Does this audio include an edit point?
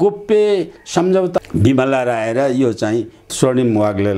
yes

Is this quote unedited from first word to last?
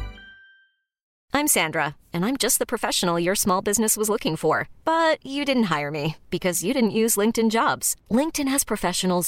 no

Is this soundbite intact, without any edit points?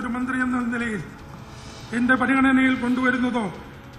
no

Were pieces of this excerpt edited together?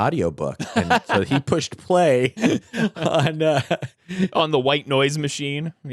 no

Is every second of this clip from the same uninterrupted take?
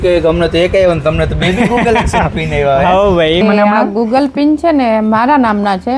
no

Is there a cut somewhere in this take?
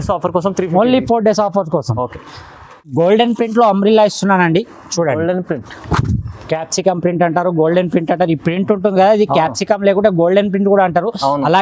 yes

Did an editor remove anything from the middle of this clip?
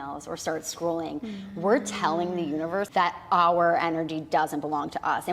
yes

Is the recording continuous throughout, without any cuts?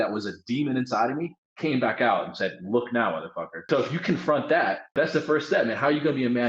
no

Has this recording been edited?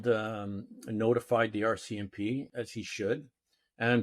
yes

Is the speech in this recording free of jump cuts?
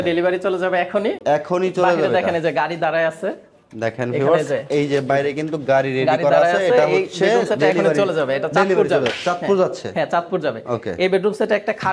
yes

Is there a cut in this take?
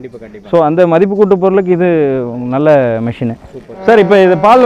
yes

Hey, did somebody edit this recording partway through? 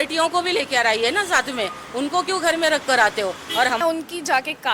yes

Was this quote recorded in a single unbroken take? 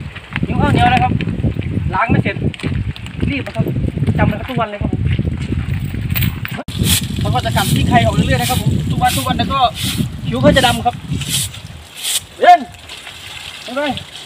no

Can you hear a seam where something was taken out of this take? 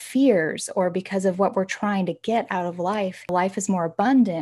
yes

